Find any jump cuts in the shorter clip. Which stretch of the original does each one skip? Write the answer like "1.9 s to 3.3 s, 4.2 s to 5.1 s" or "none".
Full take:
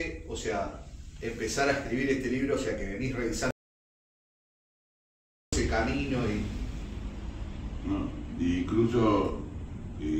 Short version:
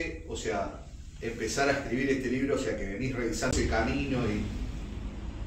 3.5 s to 5.5 s